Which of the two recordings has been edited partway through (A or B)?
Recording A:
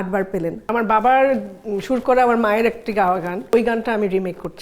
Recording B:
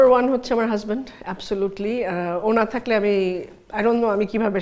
A